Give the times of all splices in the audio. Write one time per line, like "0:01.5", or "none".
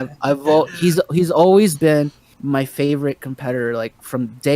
0:02.3